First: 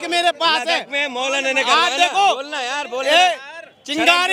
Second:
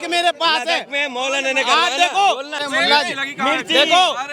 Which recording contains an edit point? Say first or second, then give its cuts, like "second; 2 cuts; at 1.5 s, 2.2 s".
second; 1 cut; at 2.6 s